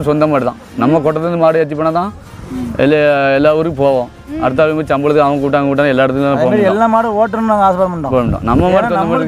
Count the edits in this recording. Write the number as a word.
zero